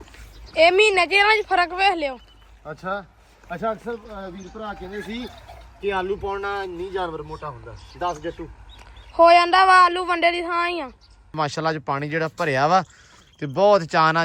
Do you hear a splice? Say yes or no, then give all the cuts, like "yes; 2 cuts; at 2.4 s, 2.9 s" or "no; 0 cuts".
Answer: yes; 1 cut; at 11.4 s